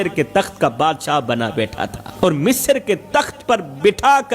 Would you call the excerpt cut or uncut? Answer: cut